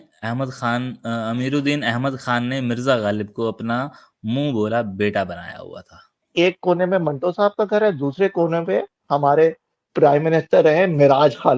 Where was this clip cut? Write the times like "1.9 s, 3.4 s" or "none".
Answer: 6.2 s